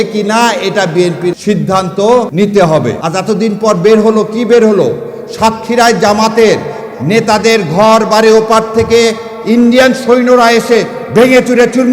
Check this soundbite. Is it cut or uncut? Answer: cut